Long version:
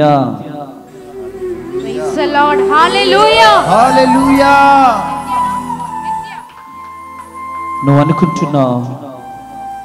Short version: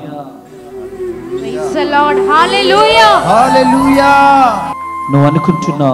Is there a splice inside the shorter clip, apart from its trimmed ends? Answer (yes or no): yes